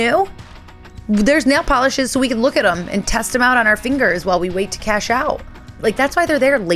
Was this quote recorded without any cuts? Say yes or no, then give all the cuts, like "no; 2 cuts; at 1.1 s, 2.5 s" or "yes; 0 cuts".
no; 1 cut; at 5.7 s